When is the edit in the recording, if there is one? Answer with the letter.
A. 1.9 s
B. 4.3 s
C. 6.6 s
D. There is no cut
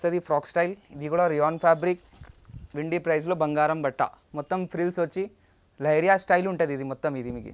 B